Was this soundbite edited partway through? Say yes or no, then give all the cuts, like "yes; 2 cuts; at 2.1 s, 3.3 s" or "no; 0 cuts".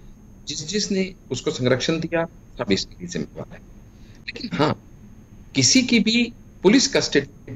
no; 0 cuts